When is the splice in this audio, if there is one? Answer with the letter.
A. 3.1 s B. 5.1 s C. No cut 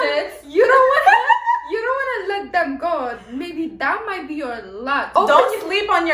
B